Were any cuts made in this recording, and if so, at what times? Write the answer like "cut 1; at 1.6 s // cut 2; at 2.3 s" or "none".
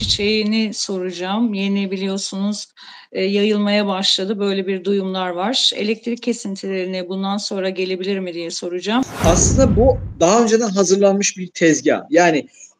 cut 1; at 9.1 s